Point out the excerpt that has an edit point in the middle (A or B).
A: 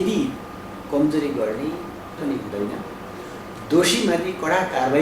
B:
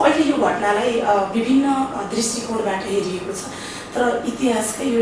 A